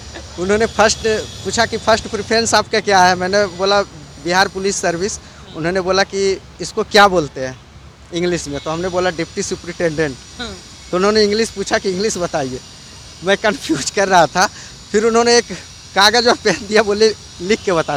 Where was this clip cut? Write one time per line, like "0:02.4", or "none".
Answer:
none